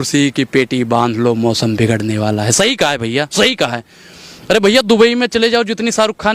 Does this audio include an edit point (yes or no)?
no